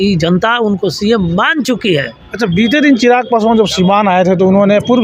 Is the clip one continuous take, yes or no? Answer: yes